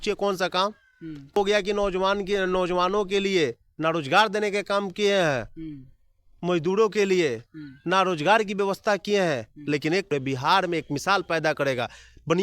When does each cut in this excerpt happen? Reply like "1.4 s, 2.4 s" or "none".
1.4 s, 10.1 s